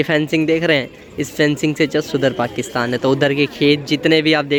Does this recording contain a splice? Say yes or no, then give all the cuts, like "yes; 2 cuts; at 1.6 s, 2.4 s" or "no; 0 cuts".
no; 0 cuts